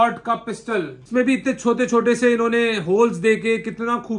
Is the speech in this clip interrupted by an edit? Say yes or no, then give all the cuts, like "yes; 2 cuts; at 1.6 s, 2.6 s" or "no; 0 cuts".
yes; 1 cut; at 1.0 s